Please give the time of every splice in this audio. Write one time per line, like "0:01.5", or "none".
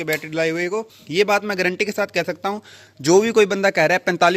0:01.0